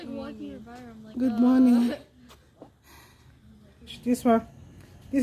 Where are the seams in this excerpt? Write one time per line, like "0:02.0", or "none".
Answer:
0:04.0